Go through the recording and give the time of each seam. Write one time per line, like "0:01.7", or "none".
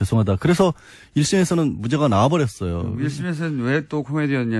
0:03.1